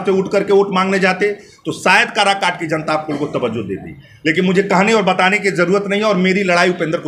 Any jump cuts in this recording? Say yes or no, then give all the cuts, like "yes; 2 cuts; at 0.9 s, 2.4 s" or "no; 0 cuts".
no; 0 cuts